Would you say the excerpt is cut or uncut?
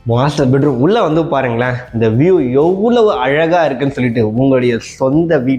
uncut